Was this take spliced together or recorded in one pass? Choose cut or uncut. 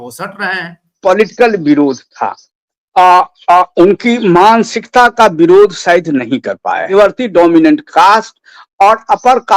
cut